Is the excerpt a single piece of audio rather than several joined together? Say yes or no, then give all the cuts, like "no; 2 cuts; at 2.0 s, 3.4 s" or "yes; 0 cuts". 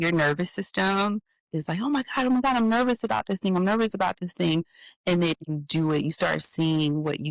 yes; 0 cuts